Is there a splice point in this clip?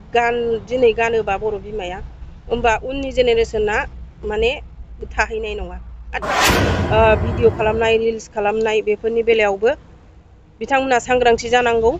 yes; 1 cut; at 6.4 s

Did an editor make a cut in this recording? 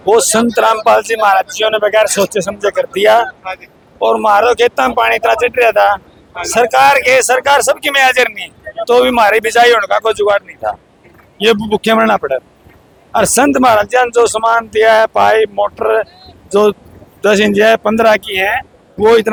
no; 0 cuts

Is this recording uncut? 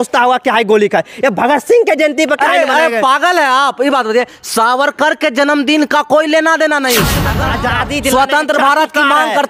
no; 1 cut; at 7.3 s

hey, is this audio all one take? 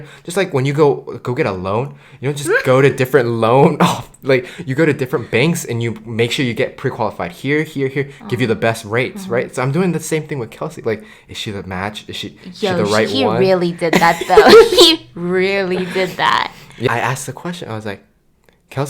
no; 1 cut; at 16.9 s

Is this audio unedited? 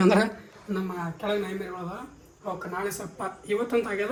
yes; 0 cuts

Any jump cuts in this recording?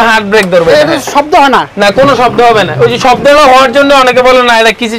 no; 0 cuts

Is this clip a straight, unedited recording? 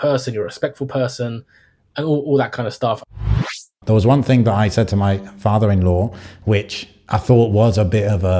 no; 1 cut; at 3.3 s

